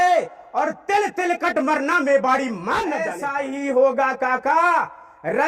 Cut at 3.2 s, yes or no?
yes